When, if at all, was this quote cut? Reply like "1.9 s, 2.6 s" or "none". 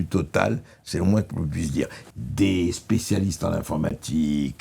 2.0 s

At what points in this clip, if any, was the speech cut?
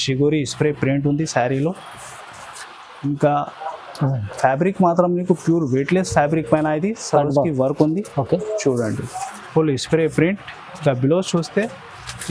none

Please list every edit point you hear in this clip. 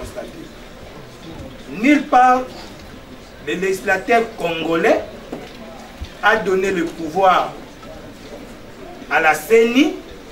none

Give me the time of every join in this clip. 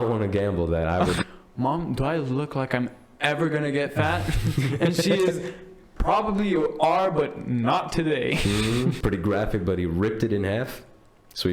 1.2 s, 9.0 s

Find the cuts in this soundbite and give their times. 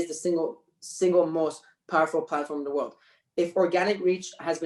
none

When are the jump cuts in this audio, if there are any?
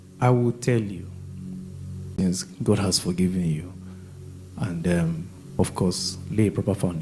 2.2 s

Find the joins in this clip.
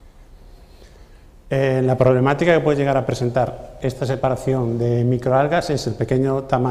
none

